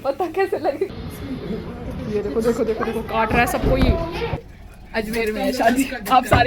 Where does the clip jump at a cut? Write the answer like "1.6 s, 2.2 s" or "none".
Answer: 1.0 s, 4.3 s